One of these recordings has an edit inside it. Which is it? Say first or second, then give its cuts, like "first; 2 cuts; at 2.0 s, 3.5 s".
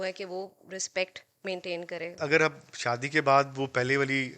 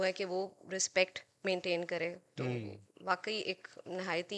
first; 1 cut; at 2.2 s